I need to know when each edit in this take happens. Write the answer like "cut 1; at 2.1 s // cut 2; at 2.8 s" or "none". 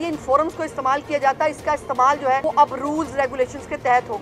none